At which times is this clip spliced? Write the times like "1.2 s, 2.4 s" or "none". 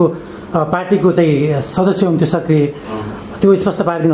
none